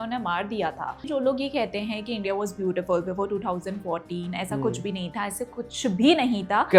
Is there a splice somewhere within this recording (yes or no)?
yes